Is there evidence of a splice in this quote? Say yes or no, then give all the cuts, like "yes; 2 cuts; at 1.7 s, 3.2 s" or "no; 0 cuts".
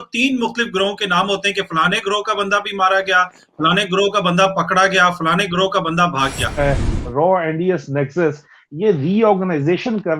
yes; 1 cut; at 6.6 s